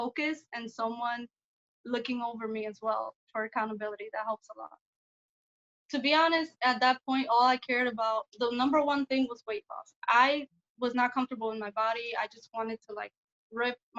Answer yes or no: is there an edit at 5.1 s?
yes